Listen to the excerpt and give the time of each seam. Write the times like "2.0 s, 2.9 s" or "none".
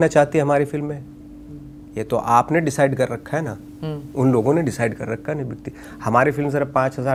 none